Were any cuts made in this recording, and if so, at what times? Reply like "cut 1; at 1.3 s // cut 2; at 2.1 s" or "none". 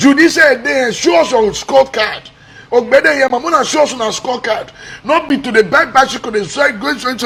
none